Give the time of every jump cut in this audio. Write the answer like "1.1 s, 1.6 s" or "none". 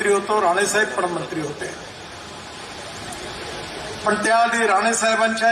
none